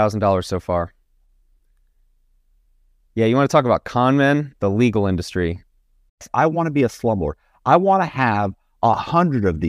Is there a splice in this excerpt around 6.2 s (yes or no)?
yes